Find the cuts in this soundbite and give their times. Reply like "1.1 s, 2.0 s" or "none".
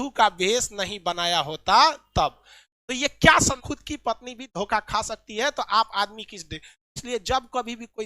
3.6 s